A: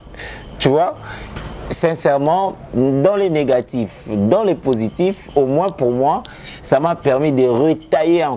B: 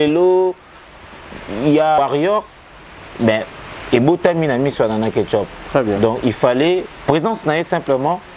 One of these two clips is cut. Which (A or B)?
B